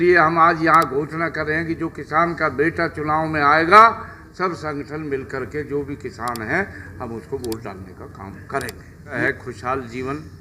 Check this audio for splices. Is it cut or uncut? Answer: uncut